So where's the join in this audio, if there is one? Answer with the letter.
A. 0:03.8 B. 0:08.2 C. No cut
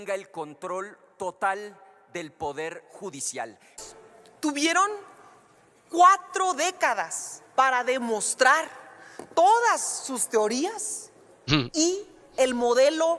A